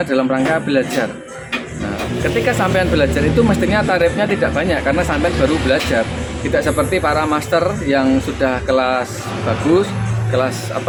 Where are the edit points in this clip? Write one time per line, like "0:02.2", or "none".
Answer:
none